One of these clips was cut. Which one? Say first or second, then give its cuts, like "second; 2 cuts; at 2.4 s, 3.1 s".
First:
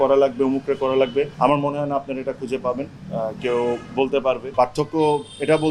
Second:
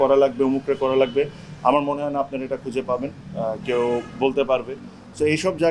first; 2 cuts; at 1.3 s, 4.5 s